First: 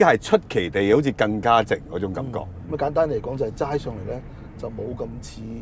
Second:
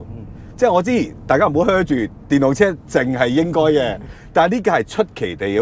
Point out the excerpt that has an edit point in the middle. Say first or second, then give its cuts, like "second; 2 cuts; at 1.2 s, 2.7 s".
first; 1 cut; at 2.5 s